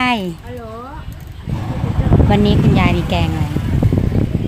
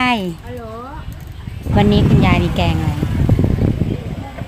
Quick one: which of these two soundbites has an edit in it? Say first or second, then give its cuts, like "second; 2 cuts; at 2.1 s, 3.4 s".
second; 1 cut; at 1.7 s